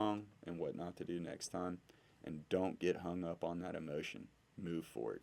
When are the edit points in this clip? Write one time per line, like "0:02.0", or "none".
none

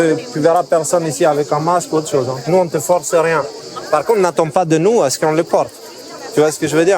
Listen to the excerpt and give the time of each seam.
0:02.5

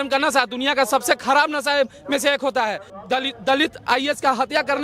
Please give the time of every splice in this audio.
0:02.9

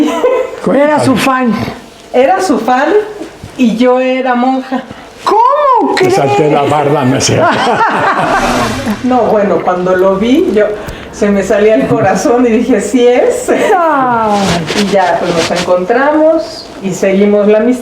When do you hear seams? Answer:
0:08.6

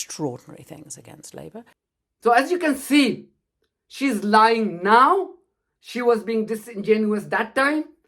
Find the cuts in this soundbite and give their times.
none

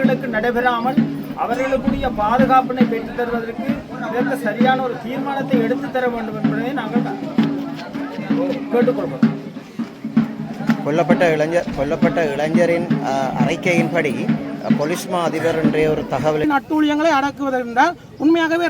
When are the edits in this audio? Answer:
0:16.4

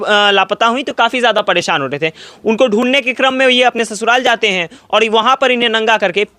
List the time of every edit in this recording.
none

